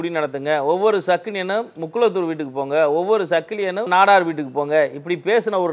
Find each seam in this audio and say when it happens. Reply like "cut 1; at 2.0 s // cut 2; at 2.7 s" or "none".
cut 1; at 3.9 s